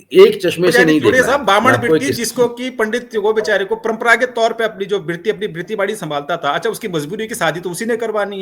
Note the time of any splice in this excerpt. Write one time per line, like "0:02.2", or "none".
0:01.1

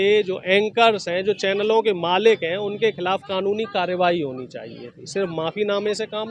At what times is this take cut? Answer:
none

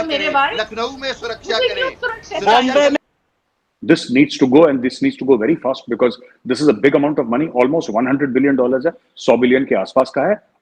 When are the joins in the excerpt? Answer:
0:03.0

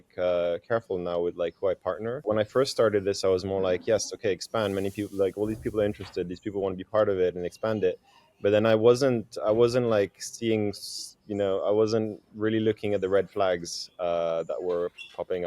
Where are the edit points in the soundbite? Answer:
0:02.2

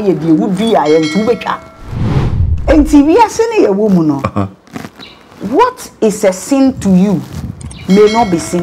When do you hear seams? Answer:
0:02.3

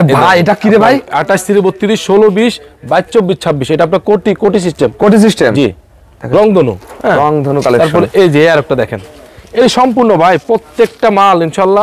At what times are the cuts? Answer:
none

